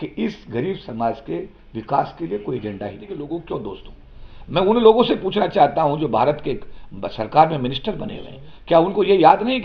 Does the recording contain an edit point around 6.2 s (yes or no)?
no